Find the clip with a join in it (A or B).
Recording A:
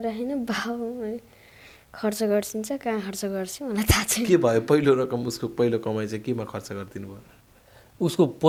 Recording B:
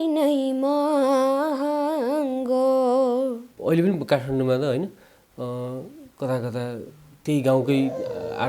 B